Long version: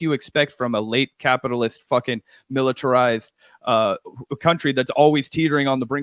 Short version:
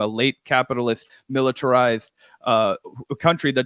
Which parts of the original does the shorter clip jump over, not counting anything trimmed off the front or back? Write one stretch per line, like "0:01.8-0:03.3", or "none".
0:01.8-0:02.3